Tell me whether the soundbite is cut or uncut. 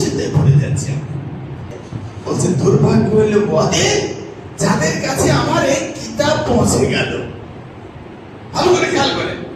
cut